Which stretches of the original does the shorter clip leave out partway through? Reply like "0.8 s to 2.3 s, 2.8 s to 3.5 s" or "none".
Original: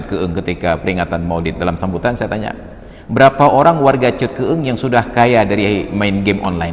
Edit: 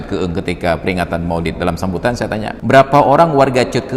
2.5 s to 3.0 s

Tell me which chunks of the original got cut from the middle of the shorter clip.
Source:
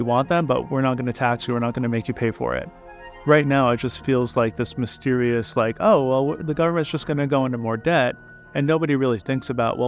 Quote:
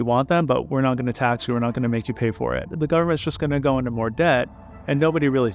2.8 s to 6.4 s

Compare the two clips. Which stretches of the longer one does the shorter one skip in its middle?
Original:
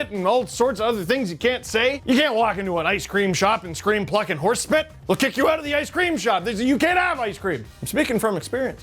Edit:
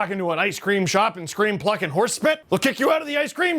4.9 s to 5.0 s

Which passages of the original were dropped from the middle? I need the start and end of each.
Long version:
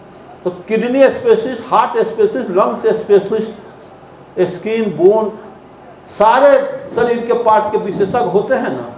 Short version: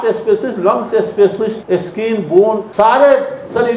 3.5 s to 4.3 s, 5.3 s to 6.1 s

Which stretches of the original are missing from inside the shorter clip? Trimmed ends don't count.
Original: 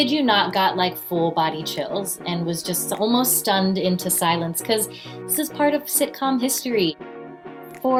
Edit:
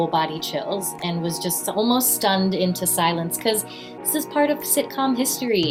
none

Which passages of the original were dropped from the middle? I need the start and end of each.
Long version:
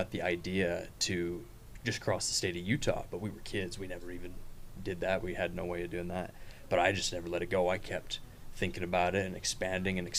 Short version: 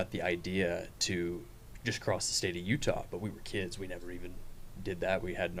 none

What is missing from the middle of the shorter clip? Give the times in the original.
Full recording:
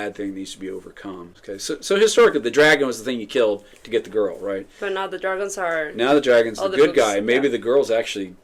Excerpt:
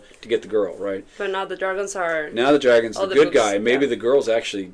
none

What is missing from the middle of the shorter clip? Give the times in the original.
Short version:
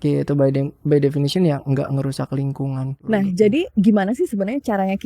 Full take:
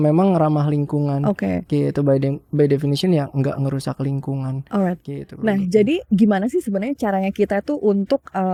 4.6 s to 5.3 s

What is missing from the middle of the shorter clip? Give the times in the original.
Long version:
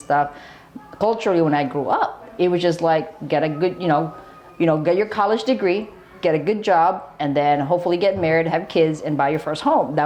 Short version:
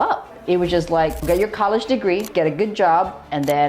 3.1 s to 4.8 s, 5.8 s to 6.1 s

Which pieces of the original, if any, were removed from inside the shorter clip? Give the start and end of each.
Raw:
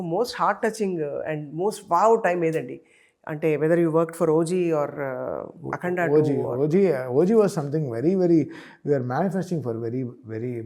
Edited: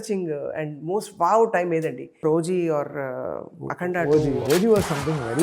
2.9 s to 4.3 s, 6.5 s to 7.1 s

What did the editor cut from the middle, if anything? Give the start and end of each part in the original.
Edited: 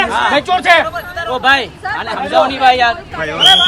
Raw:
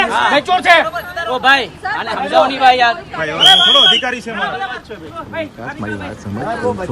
none

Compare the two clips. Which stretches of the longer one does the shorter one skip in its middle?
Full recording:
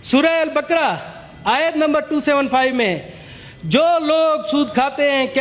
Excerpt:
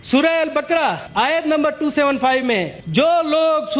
1.0 s to 1.3 s, 3.1 s to 3.5 s

